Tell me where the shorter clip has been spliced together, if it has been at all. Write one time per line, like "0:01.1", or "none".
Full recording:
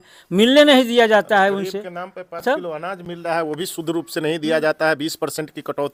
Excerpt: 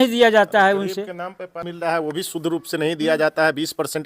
0:01.6